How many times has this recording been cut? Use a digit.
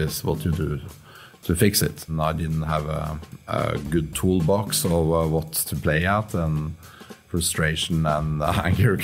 1